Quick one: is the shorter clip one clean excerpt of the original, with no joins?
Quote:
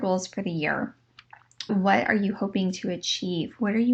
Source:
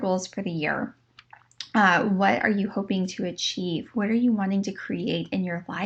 no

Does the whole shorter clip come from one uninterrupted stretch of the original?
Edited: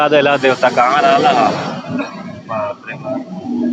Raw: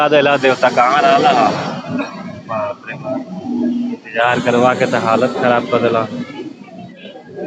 yes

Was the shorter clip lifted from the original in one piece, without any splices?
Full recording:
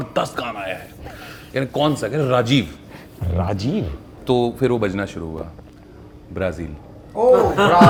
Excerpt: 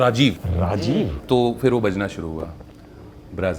no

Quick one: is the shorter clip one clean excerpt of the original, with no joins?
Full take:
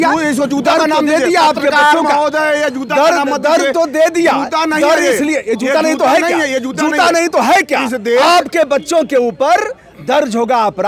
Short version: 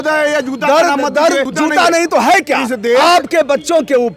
no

